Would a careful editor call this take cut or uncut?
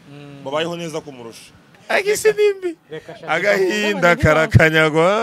cut